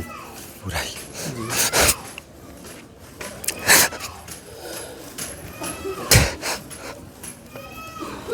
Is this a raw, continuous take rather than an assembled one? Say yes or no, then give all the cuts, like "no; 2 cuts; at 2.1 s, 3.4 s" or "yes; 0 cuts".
yes; 0 cuts